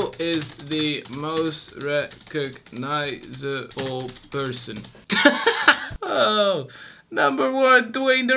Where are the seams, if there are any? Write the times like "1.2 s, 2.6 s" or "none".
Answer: 5.9 s